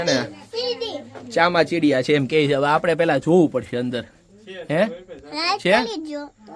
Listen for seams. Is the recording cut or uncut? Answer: uncut